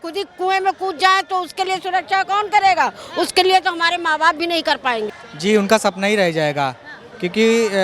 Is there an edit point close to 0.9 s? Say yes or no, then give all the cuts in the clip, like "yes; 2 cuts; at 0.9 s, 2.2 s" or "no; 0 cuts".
no; 1 cut; at 5.2 s